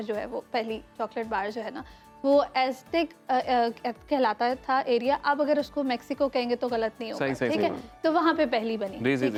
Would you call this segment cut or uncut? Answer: uncut